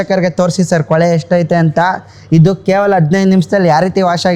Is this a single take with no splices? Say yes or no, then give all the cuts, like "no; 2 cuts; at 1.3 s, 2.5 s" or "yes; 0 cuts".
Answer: yes; 0 cuts